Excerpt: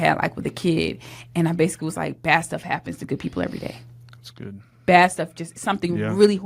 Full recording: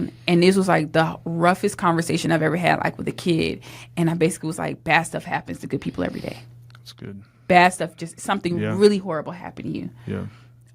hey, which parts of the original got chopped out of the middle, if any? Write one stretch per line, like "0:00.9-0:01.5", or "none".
none